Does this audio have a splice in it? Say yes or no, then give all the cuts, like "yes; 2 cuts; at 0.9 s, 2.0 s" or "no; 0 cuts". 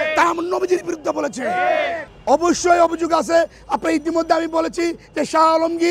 no; 0 cuts